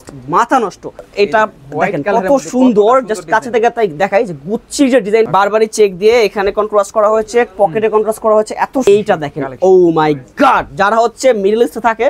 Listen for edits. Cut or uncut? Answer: cut